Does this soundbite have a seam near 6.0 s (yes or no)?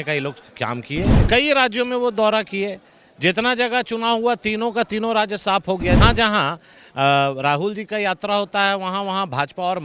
yes